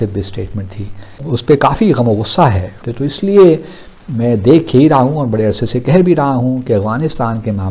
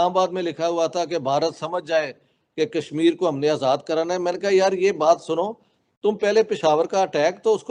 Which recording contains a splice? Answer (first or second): first